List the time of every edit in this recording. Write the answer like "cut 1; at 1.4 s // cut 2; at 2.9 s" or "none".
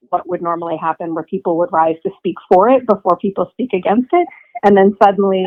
none